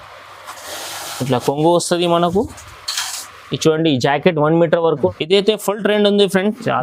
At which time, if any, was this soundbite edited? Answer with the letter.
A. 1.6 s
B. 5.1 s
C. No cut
B